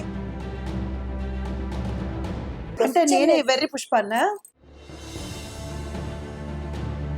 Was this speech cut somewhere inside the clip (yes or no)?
yes